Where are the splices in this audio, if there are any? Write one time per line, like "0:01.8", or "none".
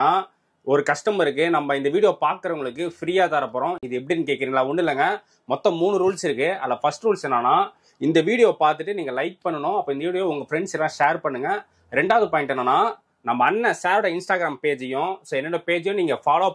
none